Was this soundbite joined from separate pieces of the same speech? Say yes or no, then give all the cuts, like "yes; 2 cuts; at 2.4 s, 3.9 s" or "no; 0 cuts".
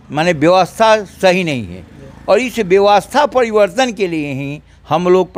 no; 0 cuts